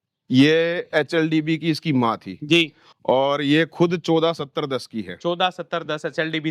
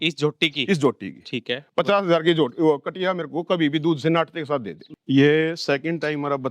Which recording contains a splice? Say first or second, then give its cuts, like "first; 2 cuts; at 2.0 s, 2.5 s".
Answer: second; 1 cut; at 4.8 s